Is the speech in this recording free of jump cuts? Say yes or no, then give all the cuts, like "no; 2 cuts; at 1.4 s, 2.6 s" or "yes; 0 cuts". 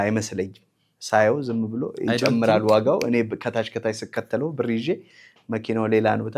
yes; 0 cuts